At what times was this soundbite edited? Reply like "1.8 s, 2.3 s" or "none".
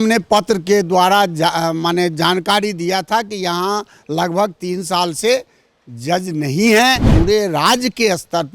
7.1 s